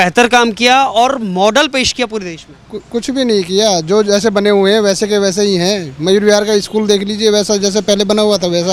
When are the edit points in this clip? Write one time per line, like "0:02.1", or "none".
none

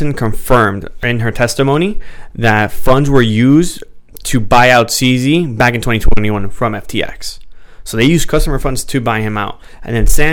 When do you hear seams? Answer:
0:01.0

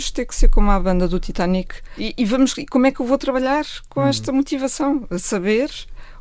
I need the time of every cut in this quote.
0:01.9

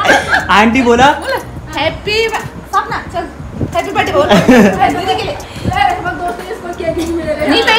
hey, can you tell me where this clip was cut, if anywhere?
none

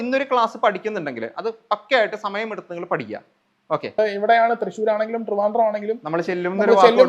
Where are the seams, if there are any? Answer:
0:04.0

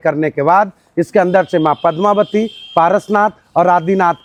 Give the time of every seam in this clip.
none

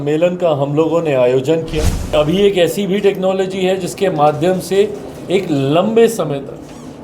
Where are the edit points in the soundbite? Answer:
0:02.1

